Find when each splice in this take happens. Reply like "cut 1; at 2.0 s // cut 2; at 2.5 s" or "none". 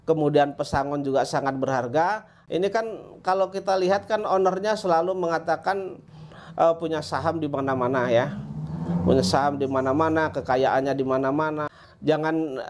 cut 1; at 2.3 s // cut 2; at 11.6 s